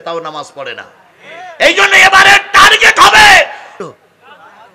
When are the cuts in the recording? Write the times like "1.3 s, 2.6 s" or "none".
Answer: 3.8 s